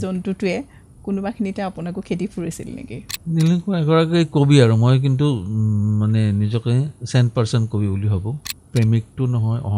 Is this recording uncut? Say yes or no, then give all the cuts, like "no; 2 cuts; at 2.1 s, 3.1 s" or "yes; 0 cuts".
no; 2 cuts; at 3.1 s, 8.4 s